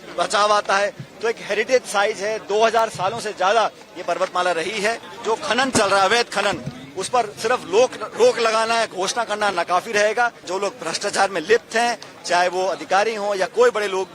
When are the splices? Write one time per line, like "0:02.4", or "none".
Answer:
0:05.1
0:10.4

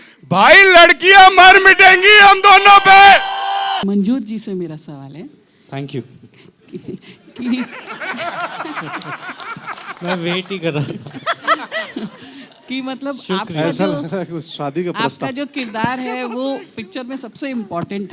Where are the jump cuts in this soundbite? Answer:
0:03.8

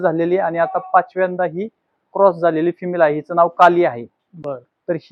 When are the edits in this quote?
none

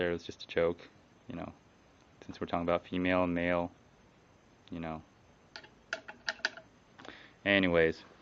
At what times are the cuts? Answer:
none

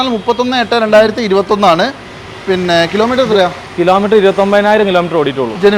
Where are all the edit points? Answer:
none

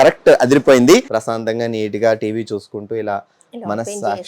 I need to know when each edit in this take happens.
0:01.1

